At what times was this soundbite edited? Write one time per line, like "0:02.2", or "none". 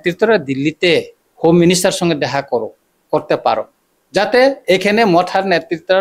0:01.2